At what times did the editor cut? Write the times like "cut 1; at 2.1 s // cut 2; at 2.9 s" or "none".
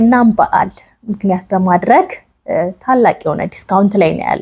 none